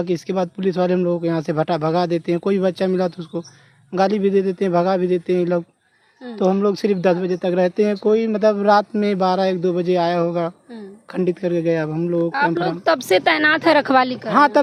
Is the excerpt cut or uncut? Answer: uncut